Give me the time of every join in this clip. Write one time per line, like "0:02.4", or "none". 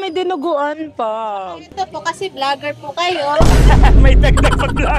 none